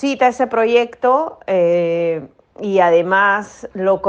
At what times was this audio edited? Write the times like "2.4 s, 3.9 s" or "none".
none